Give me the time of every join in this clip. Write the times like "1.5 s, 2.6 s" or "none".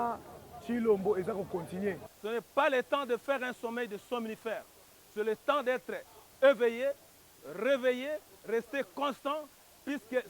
2.1 s